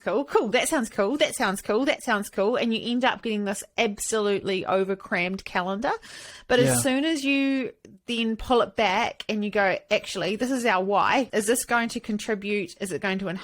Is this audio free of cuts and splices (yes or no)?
no